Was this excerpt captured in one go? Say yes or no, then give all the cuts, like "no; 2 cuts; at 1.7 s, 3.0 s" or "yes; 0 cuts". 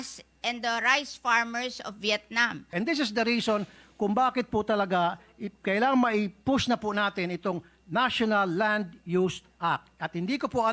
no; 1 cut; at 2.7 s